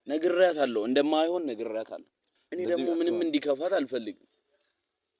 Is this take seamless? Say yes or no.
no